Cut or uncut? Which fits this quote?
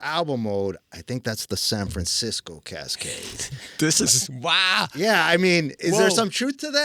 uncut